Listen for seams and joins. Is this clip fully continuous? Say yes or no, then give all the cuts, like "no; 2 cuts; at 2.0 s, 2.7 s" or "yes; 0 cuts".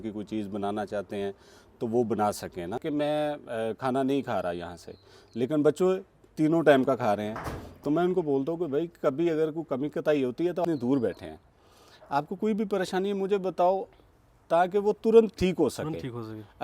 no; 2 cuts; at 2.8 s, 10.6 s